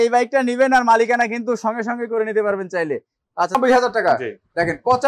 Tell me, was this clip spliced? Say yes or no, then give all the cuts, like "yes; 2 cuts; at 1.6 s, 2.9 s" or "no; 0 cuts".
yes; 1 cut; at 3.6 s